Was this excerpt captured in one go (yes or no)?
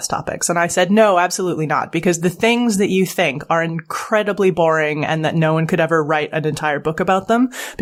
yes